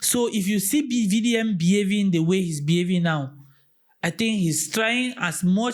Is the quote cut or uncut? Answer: uncut